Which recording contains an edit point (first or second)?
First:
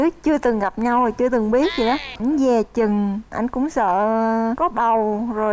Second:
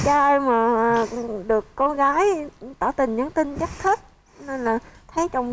first